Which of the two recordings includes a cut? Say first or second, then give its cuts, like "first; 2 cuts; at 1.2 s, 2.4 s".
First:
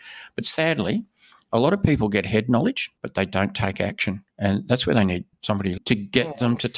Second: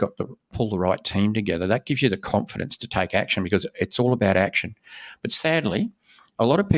first; 3 cuts; at 2.9 s, 4.3 s, 5.8 s